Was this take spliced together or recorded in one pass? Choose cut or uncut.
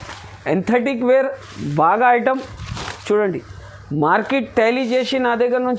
uncut